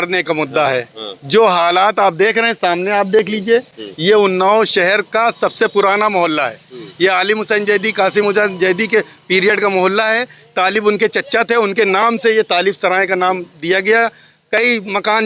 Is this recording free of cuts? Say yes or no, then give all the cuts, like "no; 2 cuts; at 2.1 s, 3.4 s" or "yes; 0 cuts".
yes; 0 cuts